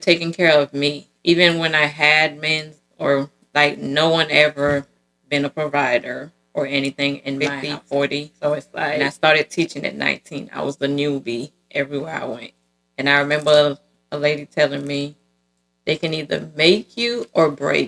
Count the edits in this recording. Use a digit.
1